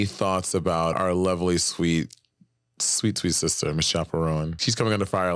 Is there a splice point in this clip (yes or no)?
yes